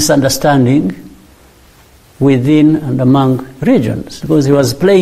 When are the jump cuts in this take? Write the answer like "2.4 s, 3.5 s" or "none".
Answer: 4.1 s